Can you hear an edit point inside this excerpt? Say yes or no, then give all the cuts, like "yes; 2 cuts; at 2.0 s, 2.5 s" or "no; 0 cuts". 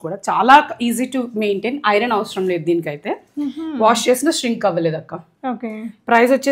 no; 0 cuts